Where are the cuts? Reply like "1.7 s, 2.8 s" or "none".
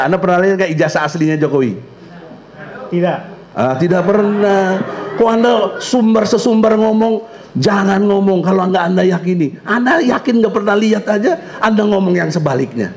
none